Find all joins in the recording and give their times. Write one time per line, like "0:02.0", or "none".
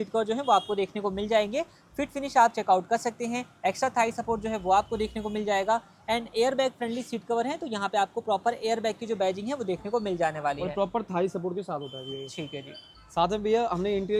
none